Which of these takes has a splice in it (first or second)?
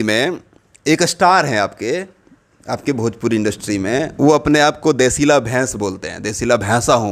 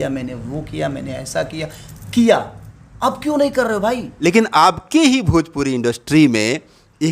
second